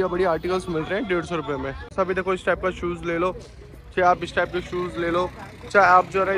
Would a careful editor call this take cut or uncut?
cut